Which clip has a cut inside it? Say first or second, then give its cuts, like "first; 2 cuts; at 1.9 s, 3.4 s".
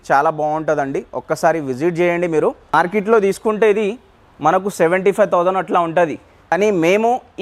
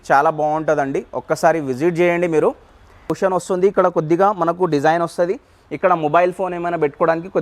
second; 1 cut; at 3.0 s